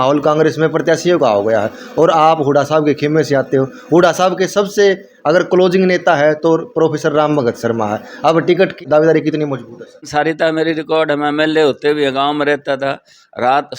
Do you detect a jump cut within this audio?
yes; 1 cut; at 9.9 s

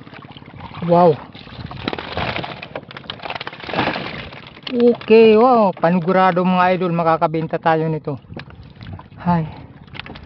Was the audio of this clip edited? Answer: yes; 1 cut; at 1.7 s

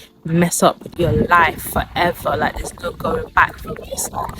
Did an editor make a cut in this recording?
yes; 1 cut; at 0.9 s

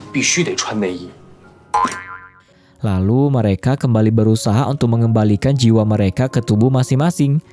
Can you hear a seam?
yes; 1 cut; at 2.6 s

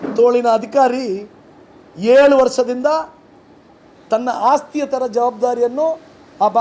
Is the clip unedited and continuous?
yes; 0 cuts

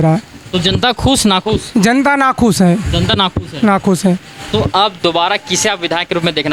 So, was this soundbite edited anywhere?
no; 0 cuts

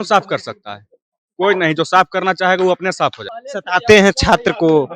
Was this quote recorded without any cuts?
no; 1 cut; at 3.2 s

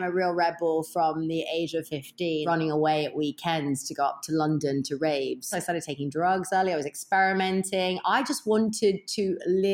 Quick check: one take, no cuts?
no; 2 cuts; at 2.4 s, 5.5 s

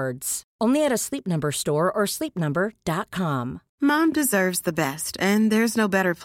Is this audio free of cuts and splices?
no; 1 cut; at 3.6 s

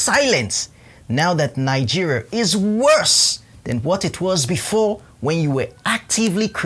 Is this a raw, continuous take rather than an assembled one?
yes; 0 cuts

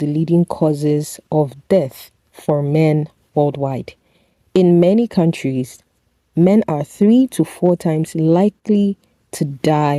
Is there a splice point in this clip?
no; 0 cuts

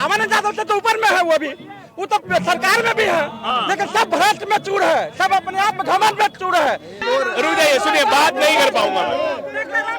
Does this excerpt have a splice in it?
yes; 1 cut; at 7.0 s

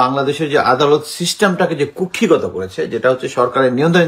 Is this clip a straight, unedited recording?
yes; 0 cuts

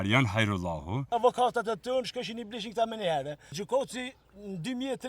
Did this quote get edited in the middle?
yes; 2 cuts; at 1.1 s, 3.6 s

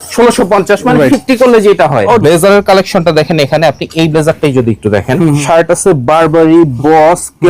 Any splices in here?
yes; 2 cuts; at 2.2 s, 5.4 s

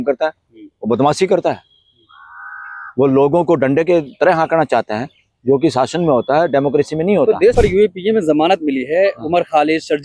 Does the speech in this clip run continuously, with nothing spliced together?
no; 1 cut; at 7.5 s

